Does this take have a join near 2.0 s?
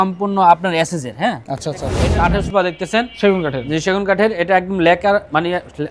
yes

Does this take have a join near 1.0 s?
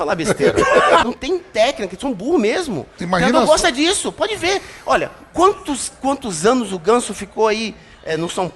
yes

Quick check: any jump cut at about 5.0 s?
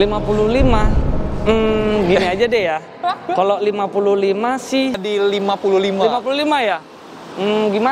yes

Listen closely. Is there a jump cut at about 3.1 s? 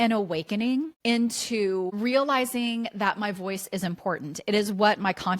no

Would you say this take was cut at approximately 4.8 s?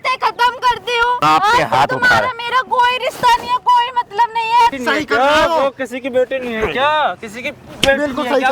yes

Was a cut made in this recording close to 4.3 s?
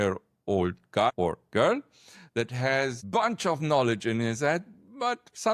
no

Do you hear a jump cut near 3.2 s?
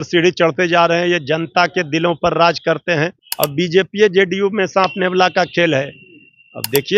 yes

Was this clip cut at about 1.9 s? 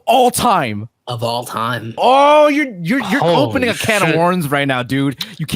yes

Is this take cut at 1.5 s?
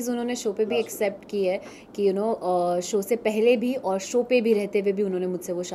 no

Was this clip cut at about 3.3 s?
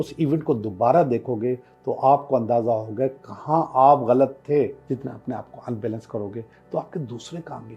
no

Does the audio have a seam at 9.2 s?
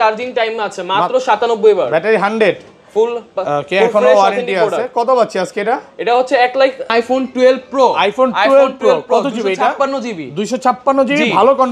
no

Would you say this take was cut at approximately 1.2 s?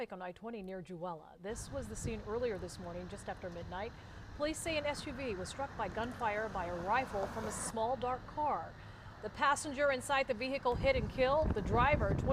yes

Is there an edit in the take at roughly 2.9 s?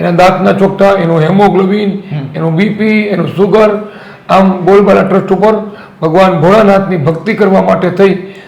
no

